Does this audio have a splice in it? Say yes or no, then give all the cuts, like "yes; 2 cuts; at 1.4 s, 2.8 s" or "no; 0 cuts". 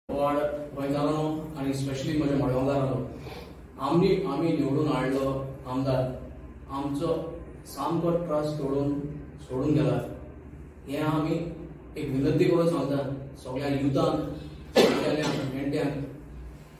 no; 0 cuts